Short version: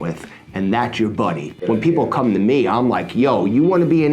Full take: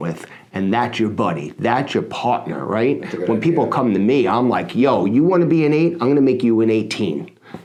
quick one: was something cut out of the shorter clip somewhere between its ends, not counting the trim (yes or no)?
yes